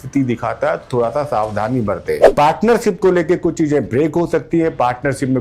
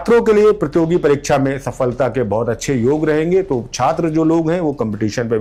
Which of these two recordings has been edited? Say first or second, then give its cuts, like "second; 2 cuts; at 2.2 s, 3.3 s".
first; 1 cut; at 2.3 s